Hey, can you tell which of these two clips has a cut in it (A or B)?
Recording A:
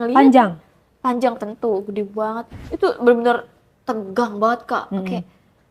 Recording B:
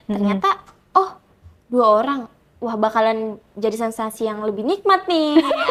A